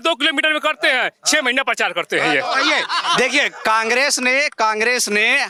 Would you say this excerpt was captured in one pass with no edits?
yes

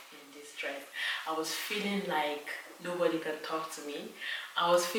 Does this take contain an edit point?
no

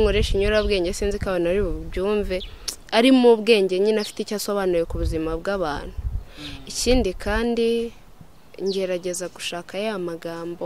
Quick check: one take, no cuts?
yes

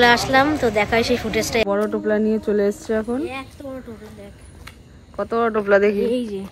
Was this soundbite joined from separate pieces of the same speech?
yes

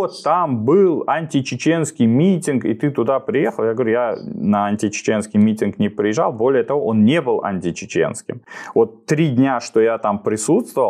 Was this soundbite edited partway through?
no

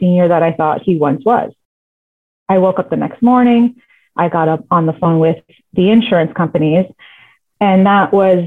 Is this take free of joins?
yes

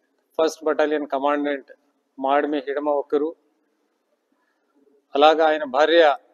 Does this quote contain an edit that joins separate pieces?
yes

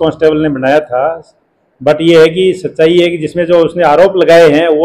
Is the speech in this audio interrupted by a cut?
no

